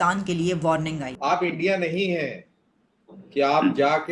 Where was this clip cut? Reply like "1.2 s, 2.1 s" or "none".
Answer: 1.1 s